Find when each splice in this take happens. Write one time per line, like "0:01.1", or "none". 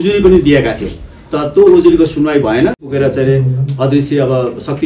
0:02.9